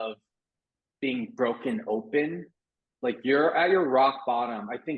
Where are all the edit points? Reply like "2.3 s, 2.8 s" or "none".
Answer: none